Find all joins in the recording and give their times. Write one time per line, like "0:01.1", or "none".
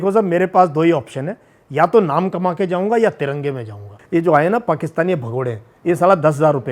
0:03.9